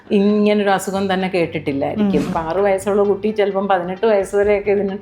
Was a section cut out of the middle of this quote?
yes; 1 cut; at 2.3 s

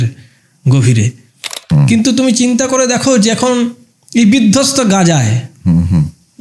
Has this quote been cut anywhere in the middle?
yes; 1 cut; at 1.6 s

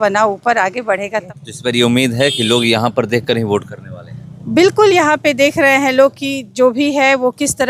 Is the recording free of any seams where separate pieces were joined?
no; 1 cut; at 1.3 s

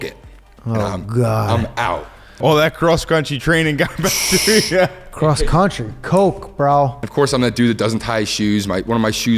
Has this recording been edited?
yes; 2 cuts; at 2.4 s, 7.0 s

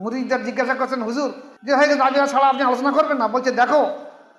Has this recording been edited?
yes; 1 cut; at 1.5 s

